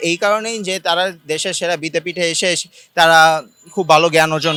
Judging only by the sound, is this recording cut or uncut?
uncut